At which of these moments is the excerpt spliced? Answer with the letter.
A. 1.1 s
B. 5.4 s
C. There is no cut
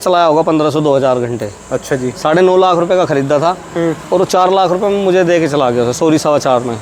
C